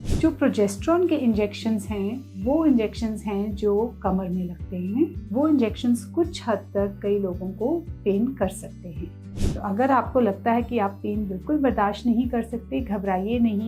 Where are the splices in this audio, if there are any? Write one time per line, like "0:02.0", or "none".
0:05.2
0:09.3

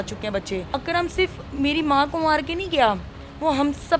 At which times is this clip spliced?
none

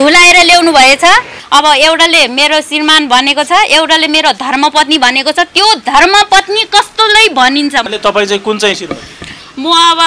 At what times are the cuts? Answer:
0:01.4
0:07.9

